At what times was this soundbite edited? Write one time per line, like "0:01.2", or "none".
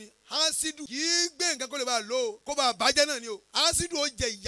0:00.8
0:02.4
0:03.5